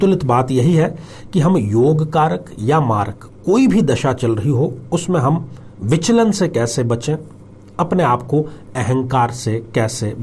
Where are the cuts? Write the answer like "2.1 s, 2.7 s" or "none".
none